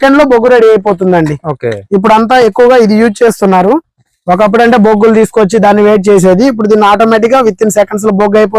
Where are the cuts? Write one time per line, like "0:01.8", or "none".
none